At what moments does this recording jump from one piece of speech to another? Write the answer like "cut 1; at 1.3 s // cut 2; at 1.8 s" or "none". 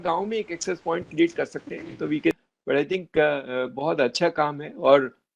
cut 1; at 2.4 s